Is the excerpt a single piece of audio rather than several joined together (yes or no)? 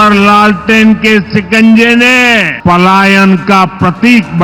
no